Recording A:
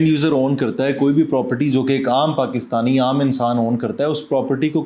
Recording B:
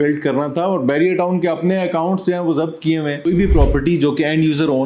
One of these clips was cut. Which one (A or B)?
B